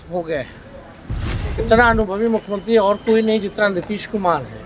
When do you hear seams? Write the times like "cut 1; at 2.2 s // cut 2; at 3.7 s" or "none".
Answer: cut 1; at 1.3 s